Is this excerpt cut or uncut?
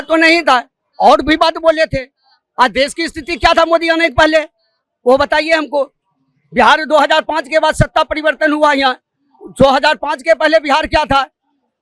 uncut